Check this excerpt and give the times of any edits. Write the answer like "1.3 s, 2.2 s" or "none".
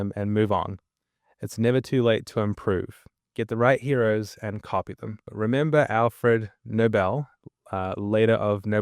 5.3 s